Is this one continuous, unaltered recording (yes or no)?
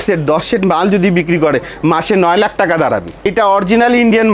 no